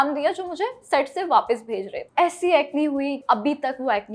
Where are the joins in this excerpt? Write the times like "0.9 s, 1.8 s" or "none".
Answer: 2.0 s, 3.2 s